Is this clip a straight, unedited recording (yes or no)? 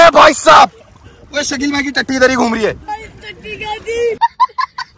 yes